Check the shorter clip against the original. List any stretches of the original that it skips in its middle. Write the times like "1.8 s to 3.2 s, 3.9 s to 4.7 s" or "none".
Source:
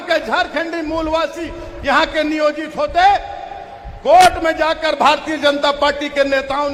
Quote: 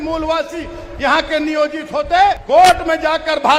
3.3 s to 4.0 s